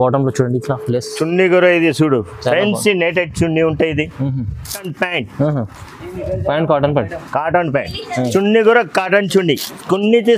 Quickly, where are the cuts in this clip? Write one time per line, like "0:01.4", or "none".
0:04.9